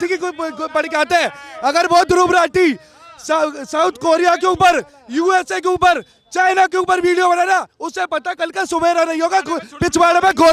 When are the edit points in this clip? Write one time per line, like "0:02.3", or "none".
none